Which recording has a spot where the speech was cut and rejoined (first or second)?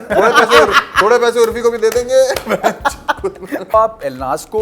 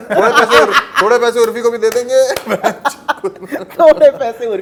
first